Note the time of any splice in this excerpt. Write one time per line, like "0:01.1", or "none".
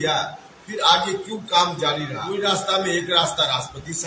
0:02.2